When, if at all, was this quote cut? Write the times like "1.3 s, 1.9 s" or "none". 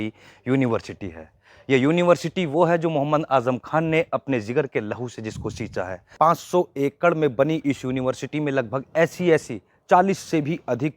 6.1 s